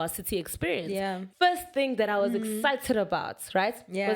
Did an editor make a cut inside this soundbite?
yes; 1 cut; at 1.2 s

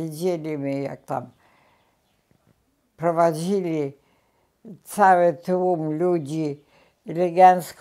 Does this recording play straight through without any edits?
yes; 0 cuts

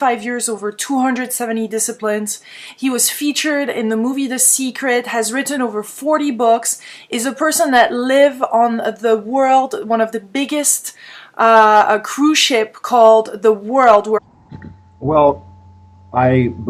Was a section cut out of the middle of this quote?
no; 0 cuts

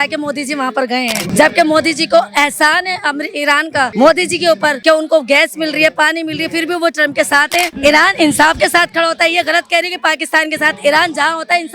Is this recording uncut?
no; 4 cuts; at 1.2 s, 3.9 s, 4.8 s, 7.7 s

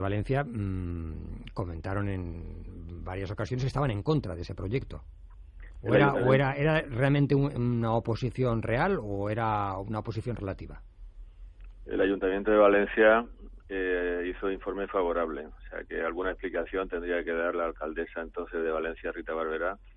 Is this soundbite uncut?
yes; 0 cuts

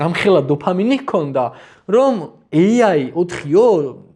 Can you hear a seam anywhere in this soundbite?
no; 0 cuts

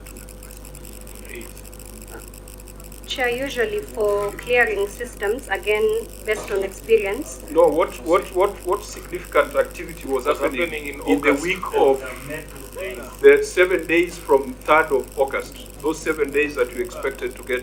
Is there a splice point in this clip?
no; 0 cuts

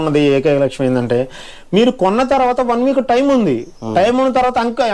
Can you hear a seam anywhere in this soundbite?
no; 0 cuts

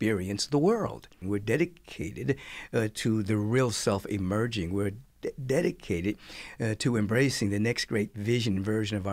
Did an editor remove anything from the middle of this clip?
yes; 1 cut; at 1.2 s

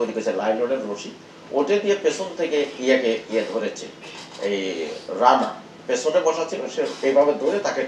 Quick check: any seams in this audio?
no; 0 cuts

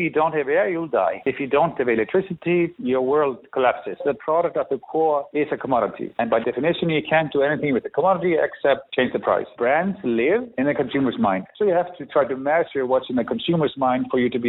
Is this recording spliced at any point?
yes; 2 cuts; at 4.0 s, 9.5 s

